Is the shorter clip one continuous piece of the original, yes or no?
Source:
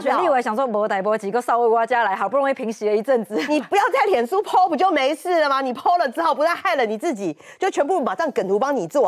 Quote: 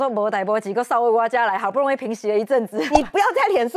yes